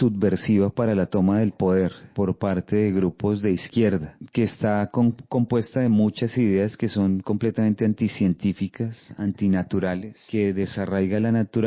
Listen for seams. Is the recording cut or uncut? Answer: cut